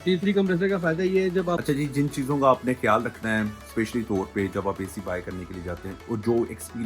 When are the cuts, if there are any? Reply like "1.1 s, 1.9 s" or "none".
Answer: 1.6 s